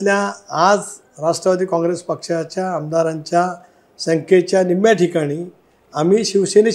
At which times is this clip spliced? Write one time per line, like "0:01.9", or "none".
none